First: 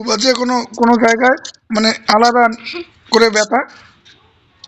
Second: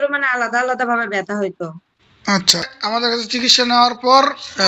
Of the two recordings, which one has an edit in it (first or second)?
second